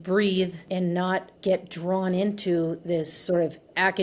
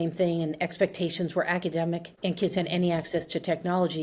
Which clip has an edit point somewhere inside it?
first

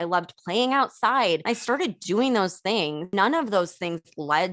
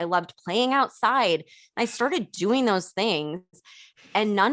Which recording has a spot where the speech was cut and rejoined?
first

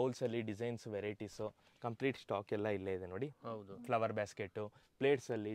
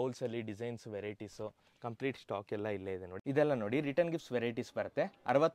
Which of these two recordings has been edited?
second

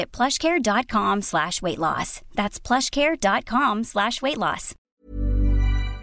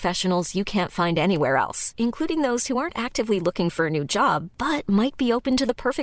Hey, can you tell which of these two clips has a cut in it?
first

